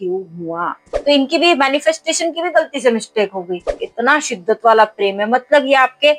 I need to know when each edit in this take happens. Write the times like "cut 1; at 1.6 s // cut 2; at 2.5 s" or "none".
cut 1; at 0.9 s // cut 2; at 3.8 s